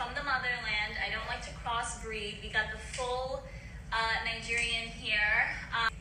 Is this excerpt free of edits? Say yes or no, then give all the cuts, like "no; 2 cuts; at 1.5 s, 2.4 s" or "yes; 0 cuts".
yes; 0 cuts